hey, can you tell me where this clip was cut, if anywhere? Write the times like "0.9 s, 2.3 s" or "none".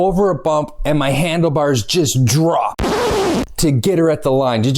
3.2 s